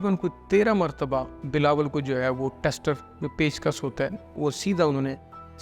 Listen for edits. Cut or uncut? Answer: cut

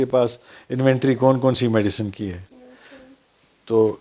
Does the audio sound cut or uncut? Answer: uncut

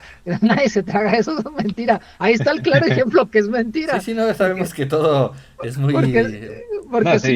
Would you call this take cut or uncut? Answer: uncut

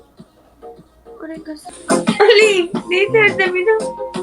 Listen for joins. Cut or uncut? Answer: cut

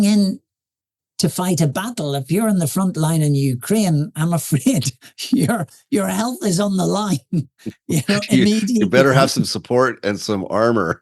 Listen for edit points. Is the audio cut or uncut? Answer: cut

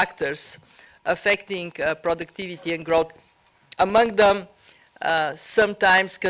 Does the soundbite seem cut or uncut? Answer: uncut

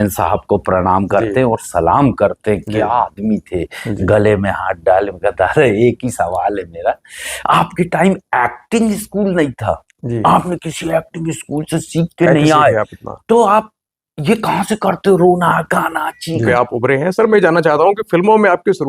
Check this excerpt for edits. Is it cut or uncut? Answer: cut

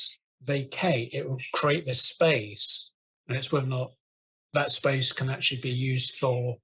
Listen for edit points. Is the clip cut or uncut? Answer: uncut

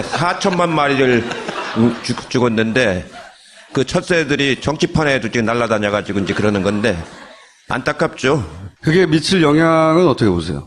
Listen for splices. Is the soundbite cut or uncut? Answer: cut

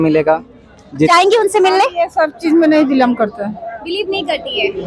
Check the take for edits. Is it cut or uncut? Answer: cut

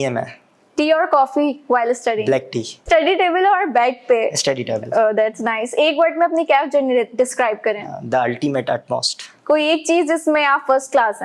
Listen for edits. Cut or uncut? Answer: cut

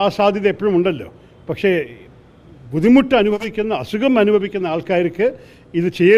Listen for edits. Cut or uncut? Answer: uncut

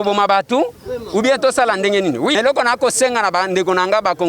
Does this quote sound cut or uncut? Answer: cut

